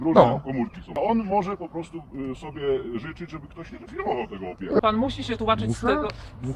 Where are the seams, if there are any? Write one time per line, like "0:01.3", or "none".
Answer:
0:01.0
0:04.8

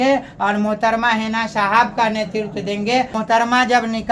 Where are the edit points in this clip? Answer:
0:03.1

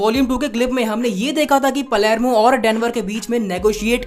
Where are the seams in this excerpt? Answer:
none

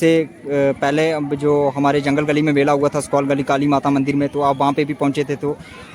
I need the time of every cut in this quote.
none

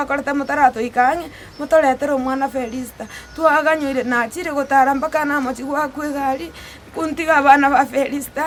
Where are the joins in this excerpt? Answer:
none

